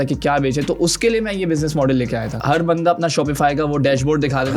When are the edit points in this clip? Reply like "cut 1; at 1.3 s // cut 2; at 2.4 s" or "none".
cut 1; at 2.4 s